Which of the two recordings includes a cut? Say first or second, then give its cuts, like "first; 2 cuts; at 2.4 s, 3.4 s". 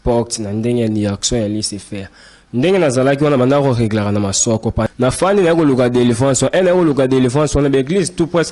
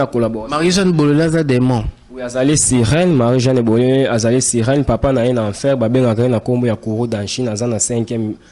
first; 1 cut; at 4.9 s